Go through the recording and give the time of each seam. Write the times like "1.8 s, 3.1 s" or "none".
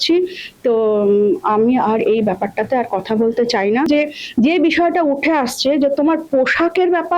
3.9 s

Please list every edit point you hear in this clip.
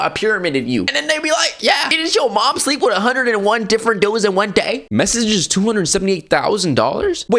4.8 s

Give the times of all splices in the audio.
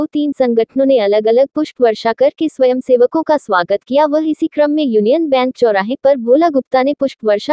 3.6 s

